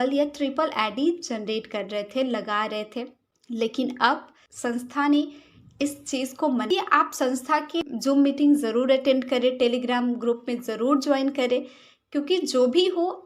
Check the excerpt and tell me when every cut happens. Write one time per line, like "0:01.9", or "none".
0:06.7

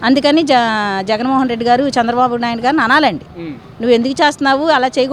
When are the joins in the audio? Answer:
none

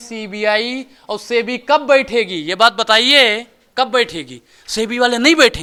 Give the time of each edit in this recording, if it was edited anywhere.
none

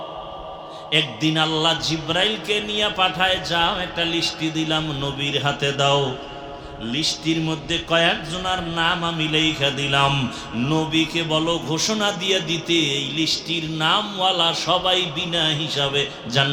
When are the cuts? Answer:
none

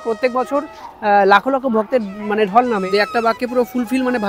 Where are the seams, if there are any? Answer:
0:02.9

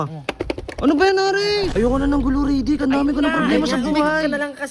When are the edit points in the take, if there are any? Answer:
0:01.7

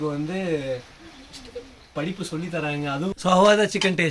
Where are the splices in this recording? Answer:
0:03.1

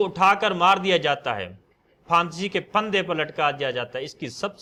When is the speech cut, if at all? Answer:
none

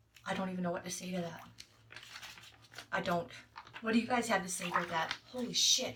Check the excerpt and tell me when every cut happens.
none

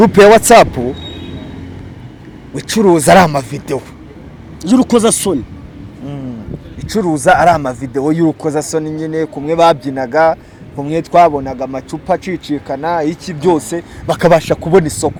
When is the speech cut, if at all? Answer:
none

